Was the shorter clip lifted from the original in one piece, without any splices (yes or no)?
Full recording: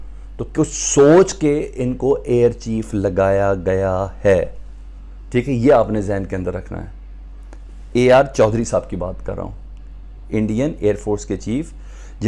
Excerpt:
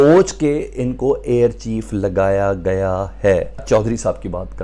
no